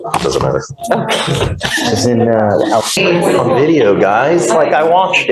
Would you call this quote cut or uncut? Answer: cut